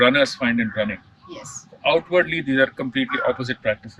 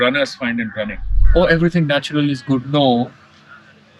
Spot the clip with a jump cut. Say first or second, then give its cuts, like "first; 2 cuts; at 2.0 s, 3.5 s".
second; 1 cut; at 1.2 s